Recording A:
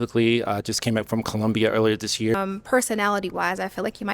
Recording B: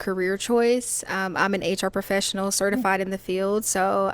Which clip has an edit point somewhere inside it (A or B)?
A